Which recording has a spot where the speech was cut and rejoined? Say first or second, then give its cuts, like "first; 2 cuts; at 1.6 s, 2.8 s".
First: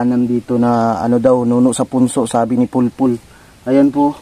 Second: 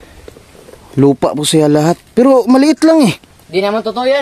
second; 1 cut; at 3.3 s